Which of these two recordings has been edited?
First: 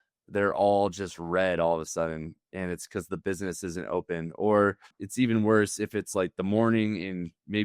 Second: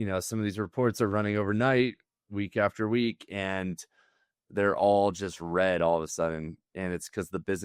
first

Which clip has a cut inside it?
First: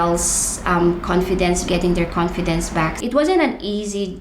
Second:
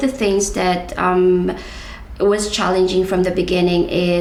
first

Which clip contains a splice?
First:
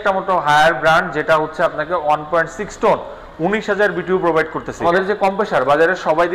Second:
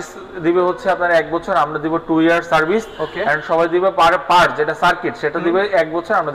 first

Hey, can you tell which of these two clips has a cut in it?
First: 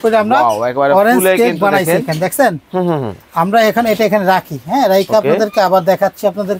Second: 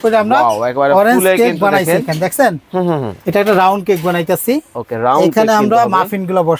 second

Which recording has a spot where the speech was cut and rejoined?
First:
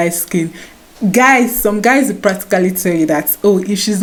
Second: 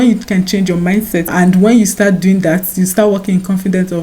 second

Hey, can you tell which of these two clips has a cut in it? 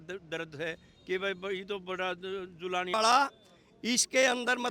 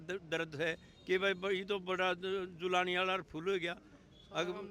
first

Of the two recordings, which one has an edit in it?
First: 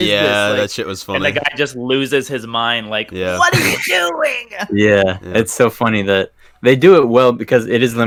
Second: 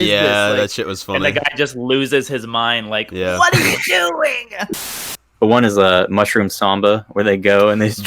second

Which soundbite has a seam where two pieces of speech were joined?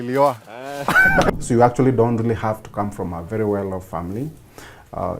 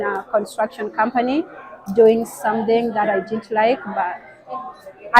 first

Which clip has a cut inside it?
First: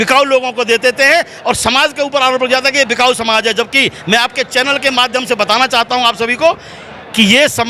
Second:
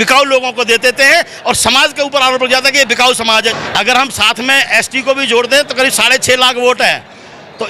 second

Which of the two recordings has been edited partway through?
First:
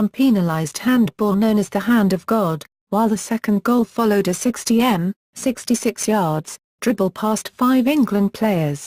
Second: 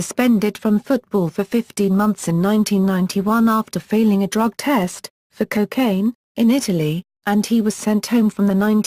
first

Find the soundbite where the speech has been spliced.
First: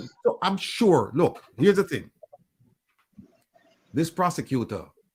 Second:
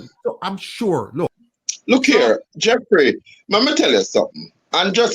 second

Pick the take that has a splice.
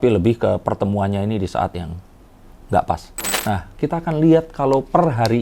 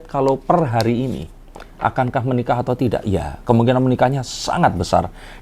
first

